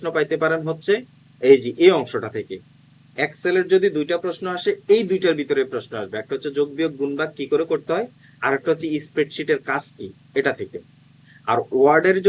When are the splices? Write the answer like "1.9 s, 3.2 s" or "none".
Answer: none

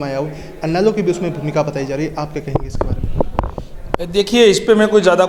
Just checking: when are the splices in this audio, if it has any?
none

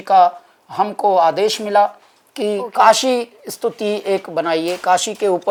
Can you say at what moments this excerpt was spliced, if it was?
none

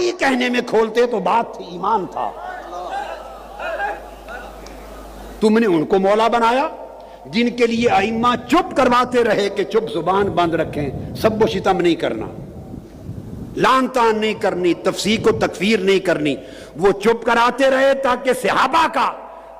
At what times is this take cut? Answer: none

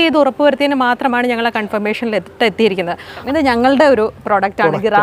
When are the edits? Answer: 3.2 s

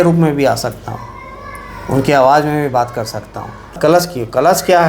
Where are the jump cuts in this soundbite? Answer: 3.8 s

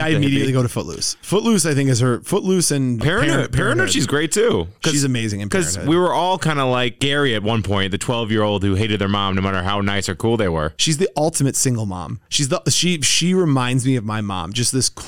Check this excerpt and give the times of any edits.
3.0 s, 10.7 s

